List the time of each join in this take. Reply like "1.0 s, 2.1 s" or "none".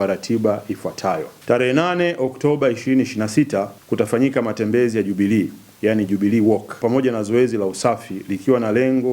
1.3 s, 3.8 s, 6.8 s